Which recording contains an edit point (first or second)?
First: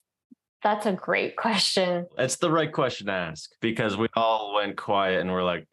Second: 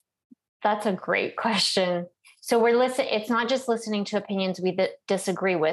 first